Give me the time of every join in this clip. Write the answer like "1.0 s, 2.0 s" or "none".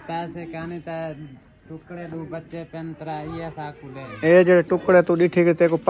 4.1 s